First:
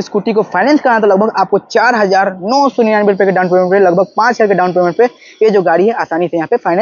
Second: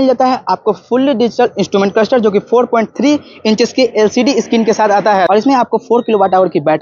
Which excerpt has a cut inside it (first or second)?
second